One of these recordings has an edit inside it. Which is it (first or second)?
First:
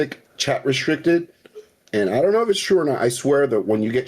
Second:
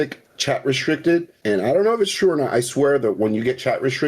second